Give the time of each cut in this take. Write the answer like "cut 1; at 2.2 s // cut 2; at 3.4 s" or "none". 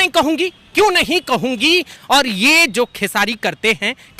cut 1; at 1.9 s